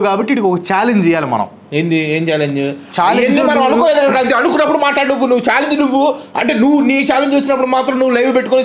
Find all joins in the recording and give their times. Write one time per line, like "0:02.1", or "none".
none